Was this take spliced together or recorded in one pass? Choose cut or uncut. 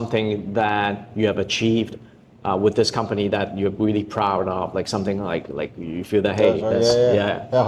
uncut